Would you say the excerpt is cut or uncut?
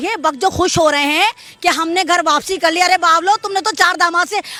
uncut